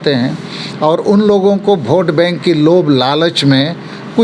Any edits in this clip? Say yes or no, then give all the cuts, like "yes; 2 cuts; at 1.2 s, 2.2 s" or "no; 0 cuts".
no; 0 cuts